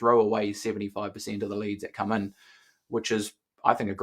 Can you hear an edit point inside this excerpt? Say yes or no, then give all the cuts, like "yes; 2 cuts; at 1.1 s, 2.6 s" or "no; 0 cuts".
no; 0 cuts